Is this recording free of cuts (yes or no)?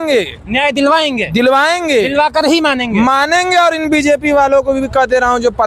yes